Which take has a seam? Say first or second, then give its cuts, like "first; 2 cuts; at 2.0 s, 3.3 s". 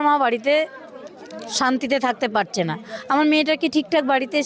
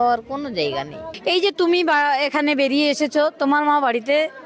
second; 1 cut; at 1.0 s